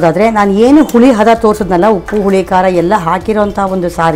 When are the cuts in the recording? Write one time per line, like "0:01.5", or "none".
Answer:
none